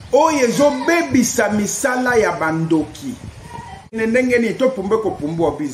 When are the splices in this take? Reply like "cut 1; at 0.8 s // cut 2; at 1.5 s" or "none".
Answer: cut 1; at 4.0 s